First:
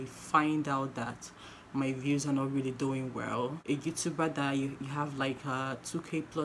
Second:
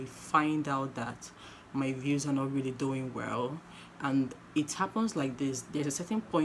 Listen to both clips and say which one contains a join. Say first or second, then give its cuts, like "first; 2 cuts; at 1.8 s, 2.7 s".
first; 1 cut; at 3.6 s